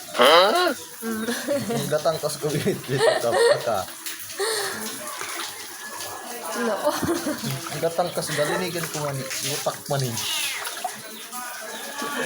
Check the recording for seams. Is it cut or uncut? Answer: cut